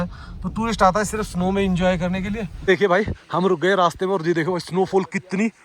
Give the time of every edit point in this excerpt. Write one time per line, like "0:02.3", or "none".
0:02.5